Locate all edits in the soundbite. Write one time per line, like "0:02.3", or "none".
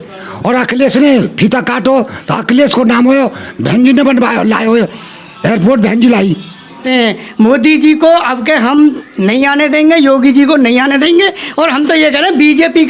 0:06.8